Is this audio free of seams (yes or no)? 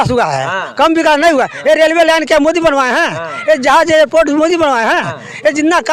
yes